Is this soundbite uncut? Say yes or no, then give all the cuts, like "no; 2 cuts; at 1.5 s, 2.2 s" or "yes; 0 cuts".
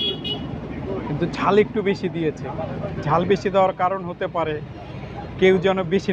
yes; 0 cuts